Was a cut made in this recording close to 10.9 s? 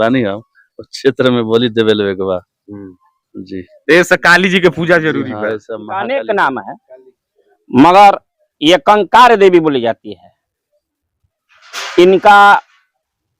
no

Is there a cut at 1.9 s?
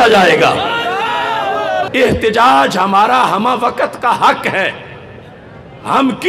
yes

